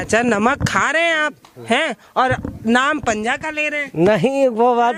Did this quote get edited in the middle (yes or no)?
no